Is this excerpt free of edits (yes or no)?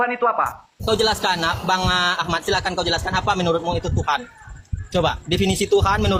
yes